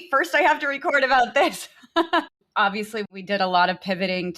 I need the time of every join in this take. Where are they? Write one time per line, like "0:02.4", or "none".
0:02.4